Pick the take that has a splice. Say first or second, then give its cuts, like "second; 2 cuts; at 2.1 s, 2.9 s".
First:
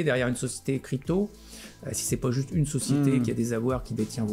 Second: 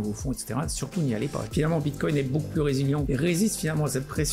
second; 2 cuts; at 1.5 s, 3.1 s